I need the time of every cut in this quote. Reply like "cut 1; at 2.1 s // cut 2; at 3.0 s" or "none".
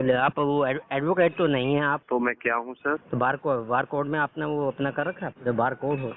cut 1; at 2.0 s // cut 2; at 3.0 s // cut 3; at 5.3 s